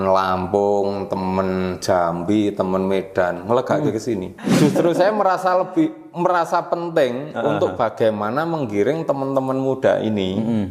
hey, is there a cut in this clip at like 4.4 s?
yes; 1 cut; at 4.4 s

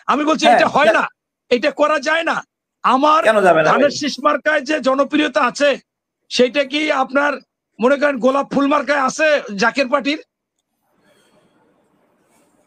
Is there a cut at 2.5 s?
no; 0 cuts

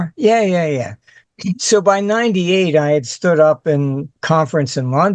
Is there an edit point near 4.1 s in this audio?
yes; 2 cuts; at 1.1 s, 4.1 s

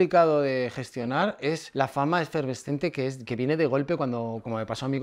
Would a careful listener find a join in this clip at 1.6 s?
yes; 1 cut; at 1.6 s

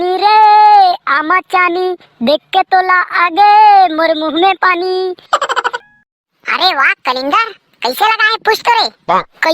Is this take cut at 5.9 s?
yes; 1 cut; at 5.9 s

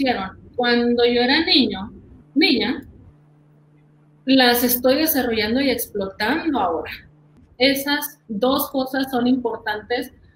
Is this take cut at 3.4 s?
no; 1 cut; at 7.2 s

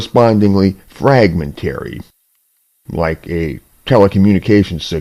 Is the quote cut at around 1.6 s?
no; 1 cut; at 3.2 s

